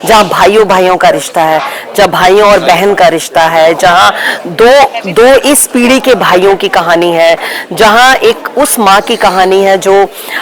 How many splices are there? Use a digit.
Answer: 0